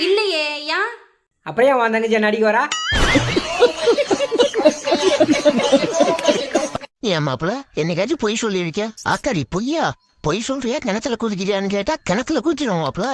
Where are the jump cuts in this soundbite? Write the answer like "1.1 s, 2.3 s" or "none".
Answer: none